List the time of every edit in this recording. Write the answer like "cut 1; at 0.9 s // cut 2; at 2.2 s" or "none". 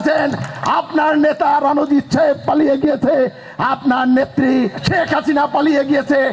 cut 1; at 4.8 s